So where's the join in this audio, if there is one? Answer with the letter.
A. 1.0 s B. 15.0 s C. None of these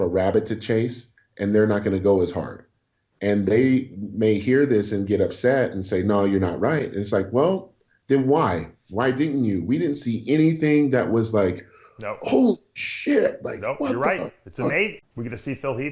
B